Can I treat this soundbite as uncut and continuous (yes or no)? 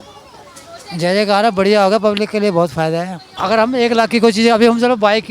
no